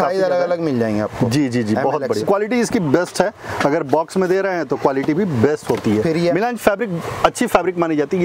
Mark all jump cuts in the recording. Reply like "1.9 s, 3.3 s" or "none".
2.2 s, 6.3 s